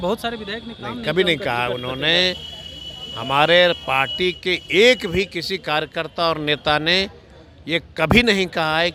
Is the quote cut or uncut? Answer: uncut